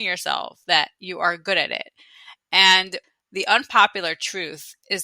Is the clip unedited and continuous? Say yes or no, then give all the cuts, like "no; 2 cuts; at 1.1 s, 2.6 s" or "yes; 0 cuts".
no; 1 cut; at 3.0 s